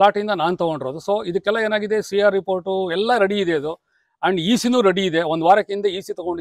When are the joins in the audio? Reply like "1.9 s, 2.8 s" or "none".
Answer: none